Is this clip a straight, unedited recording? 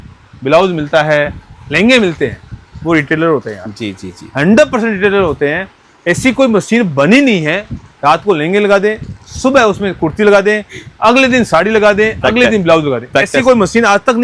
yes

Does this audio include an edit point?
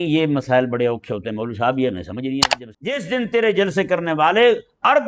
yes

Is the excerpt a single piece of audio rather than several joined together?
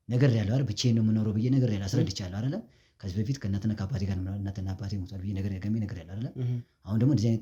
yes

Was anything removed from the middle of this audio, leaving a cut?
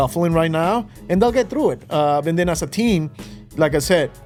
no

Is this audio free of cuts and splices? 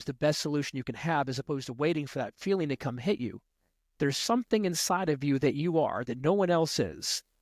no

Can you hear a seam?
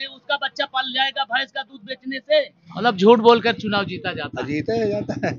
yes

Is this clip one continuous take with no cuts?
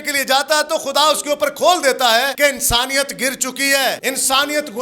no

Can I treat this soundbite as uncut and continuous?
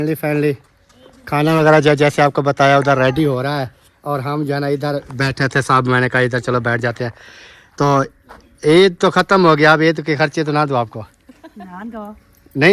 yes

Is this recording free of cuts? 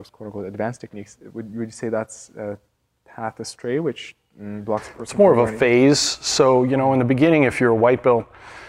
yes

